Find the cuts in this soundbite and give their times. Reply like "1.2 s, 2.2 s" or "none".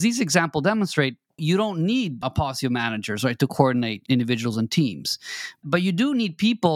1.4 s, 2.2 s, 4.0 s, 5.6 s